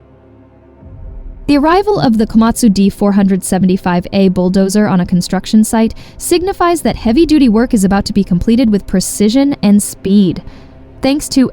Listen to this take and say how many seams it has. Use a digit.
1